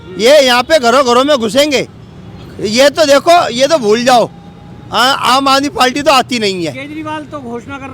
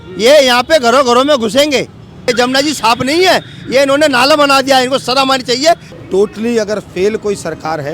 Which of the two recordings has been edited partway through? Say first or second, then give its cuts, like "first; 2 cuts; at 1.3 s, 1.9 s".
second; 2 cuts; at 2.3 s, 5.9 s